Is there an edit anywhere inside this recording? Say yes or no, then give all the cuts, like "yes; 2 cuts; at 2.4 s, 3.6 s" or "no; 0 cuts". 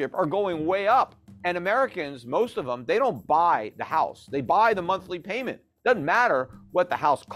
yes; 1 cut; at 1.3 s